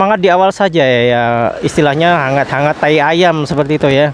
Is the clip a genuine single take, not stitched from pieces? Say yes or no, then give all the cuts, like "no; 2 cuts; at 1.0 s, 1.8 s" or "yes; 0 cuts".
yes; 0 cuts